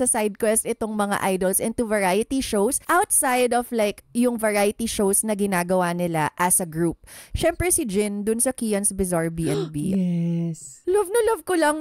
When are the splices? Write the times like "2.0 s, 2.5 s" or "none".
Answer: 2.8 s, 7.2 s, 10.4 s